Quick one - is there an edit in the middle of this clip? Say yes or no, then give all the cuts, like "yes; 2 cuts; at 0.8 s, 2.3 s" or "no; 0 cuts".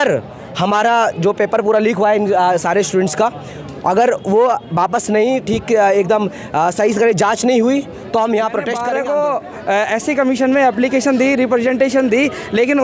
yes; 1 cut; at 8.8 s